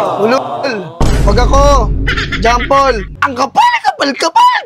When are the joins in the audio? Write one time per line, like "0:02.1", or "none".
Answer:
0:03.1